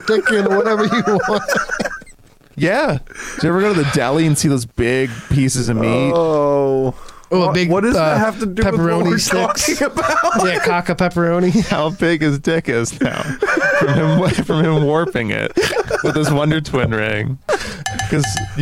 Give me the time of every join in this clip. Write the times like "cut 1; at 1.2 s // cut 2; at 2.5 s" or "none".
cut 1; at 3.4 s // cut 2; at 17.5 s